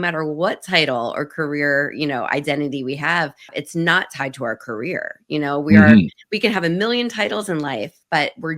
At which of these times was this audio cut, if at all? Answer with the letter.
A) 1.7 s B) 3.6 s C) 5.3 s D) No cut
B